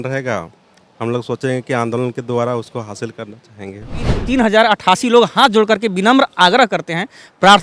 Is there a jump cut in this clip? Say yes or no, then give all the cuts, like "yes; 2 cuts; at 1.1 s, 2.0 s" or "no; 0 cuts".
yes; 1 cut; at 4.2 s